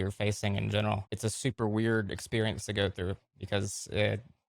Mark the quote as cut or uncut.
cut